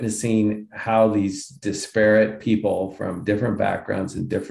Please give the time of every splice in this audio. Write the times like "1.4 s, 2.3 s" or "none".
none